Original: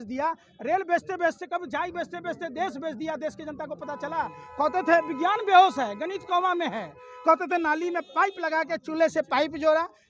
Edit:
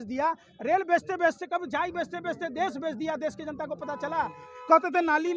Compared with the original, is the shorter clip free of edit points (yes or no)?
no